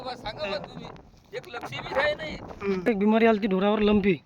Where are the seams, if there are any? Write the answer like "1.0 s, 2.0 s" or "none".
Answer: 2.9 s